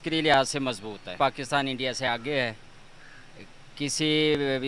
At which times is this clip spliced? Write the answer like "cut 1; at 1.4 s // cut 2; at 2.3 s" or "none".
cut 1; at 1.1 s